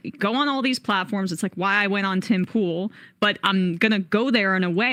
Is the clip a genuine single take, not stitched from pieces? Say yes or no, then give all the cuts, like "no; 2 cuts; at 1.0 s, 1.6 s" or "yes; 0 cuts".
yes; 0 cuts